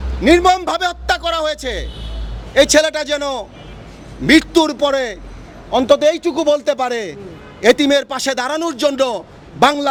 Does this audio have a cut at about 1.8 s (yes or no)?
no